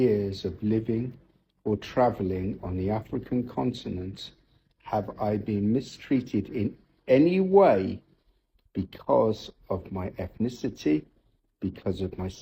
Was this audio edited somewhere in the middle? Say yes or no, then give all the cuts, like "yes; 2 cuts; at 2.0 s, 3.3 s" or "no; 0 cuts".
no; 0 cuts